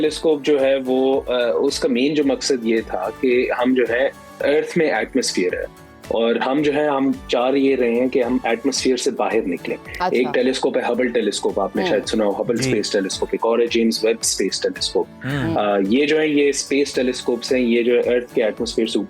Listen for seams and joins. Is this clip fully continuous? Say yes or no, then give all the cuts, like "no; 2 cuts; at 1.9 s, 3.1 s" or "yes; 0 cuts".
yes; 0 cuts